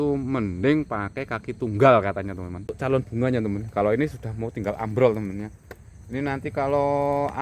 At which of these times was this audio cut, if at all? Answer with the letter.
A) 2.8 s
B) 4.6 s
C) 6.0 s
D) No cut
A